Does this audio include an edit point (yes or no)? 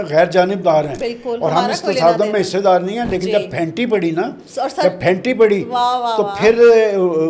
no